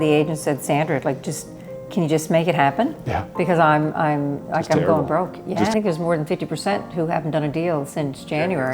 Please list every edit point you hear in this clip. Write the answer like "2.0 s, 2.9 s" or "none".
5.7 s